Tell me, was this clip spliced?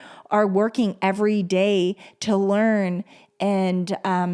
no; 0 cuts

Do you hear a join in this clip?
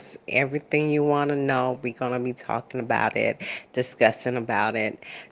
no; 0 cuts

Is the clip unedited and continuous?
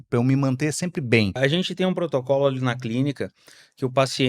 no; 1 cut; at 1.4 s

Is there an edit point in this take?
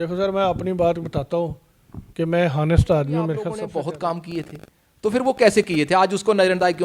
yes; 1 cut; at 3.5 s

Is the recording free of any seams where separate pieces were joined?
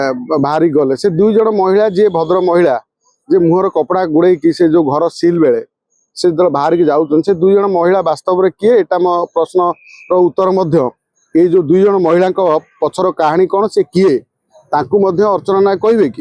yes; 0 cuts

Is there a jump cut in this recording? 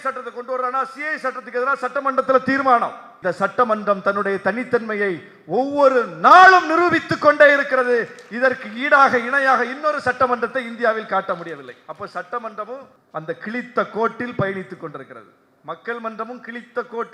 yes; 2 cuts; at 3.1 s, 13.0 s

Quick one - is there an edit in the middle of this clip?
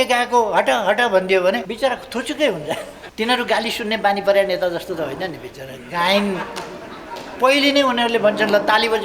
yes; 2 cuts; at 1.7 s, 3.0 s

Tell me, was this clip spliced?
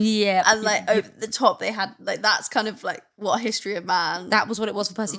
no; 0 cuts

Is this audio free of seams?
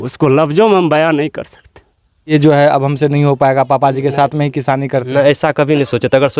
no; 1 cut; at 2.3 s

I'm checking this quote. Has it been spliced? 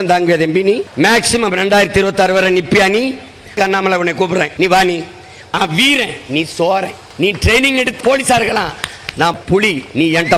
yes; 7 cuts; at 0.9 s, 3.5 s, 4.5 s, 5.5 s, 7.0 s, 8.0 s, 9.4 s

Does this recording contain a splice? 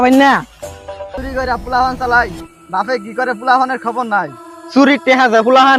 yes; 1 cut; at 1.2 s

